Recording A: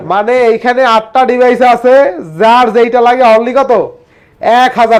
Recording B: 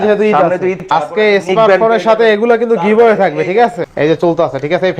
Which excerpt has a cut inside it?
B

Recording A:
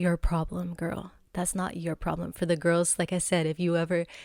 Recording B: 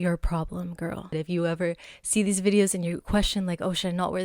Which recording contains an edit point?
B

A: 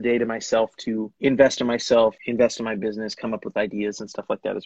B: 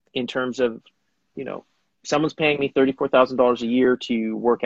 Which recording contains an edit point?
A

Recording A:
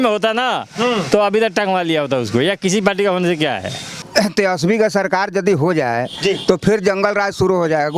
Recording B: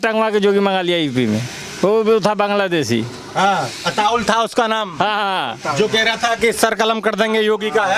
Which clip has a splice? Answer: A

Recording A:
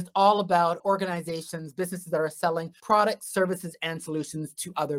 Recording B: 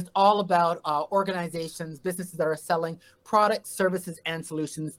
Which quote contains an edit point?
A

